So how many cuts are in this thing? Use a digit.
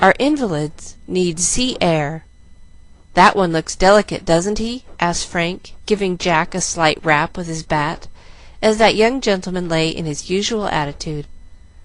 1